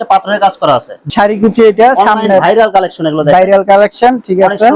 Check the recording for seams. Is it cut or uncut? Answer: cut